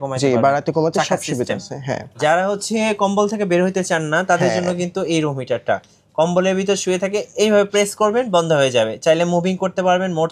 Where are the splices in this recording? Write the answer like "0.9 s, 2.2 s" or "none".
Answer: 2.2 s